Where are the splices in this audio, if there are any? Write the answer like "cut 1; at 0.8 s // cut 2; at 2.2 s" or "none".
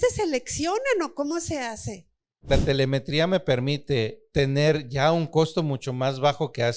cut 1; at 2.5 s // cut 2; at 4.2 s